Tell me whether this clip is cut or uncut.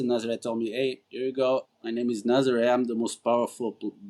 cut